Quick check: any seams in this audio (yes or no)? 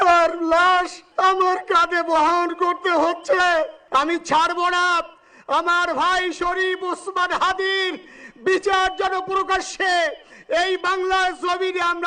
yes